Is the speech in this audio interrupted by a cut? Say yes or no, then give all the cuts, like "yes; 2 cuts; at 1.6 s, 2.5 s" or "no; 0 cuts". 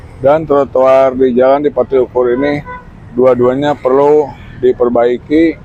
no; 0 cuts